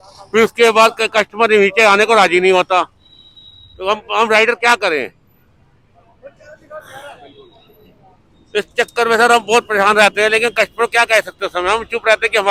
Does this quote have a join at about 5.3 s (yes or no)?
no